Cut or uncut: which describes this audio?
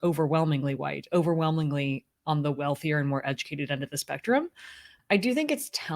cut